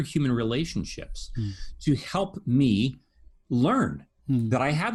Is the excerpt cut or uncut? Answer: uncut